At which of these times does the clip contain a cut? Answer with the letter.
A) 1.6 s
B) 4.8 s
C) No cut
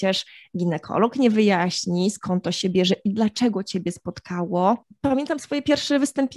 B